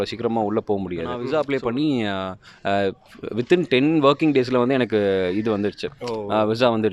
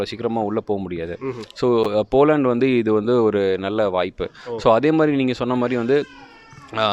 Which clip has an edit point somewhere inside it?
first; 1 cut; at 1.2 s

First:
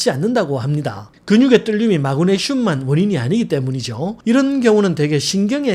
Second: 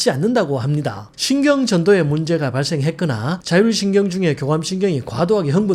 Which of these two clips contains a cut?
second; 1 cut; at 1.1 s

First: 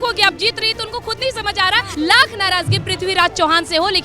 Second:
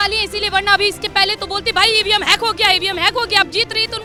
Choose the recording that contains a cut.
first; 1 cut; at 1.9 s

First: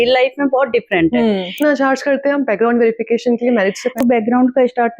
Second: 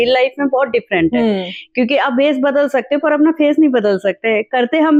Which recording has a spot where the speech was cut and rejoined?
first; 2 cuts; at 1.5 s, 4.0 s

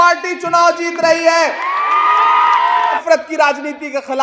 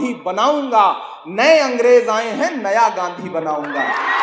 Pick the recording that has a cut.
first; 1 cut; at 3.0 s

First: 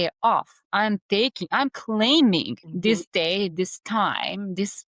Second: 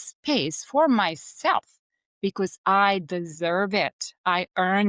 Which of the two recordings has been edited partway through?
first; 1 cut; at 2.6 s

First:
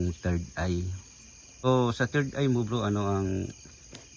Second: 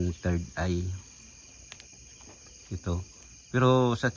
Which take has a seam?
first; 1 cut; at 1.7 s

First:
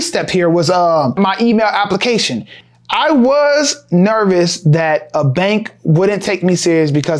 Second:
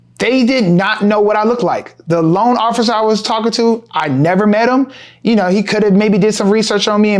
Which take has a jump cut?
first; 2 cuts; at 1.1 s, 2.6 s

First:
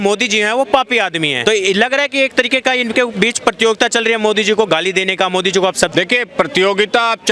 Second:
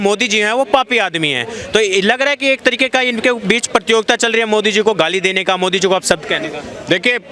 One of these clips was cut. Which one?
first; 2 cuts; at 1.4 s, 5.9 s

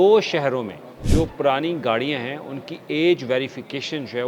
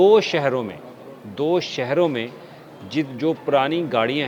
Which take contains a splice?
first; 1 cut; at 1.0 s

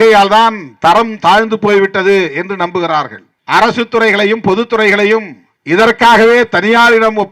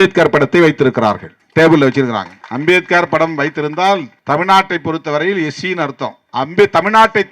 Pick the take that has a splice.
second; 3 cuts; at 2.4 s, 4.1 s, 6.2 s

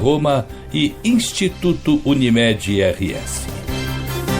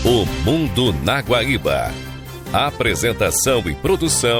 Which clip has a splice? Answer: first; 1 cut; at 3.3 s

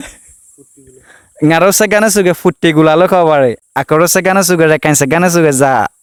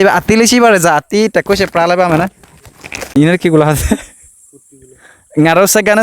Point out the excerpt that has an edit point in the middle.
second; 1 cut; at 2.4 s

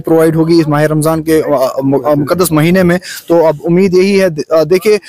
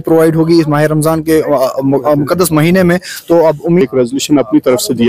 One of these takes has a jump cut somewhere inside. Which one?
second; 1 cut; at 3.8 s

